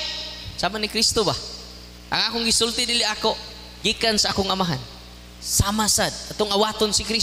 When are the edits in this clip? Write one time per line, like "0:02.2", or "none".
none